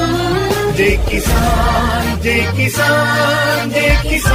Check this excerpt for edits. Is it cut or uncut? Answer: uncut